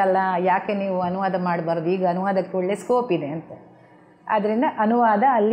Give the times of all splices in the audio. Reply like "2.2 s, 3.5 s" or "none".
none